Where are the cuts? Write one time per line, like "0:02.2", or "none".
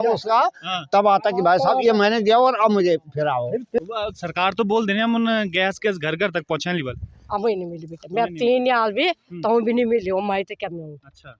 0:03.8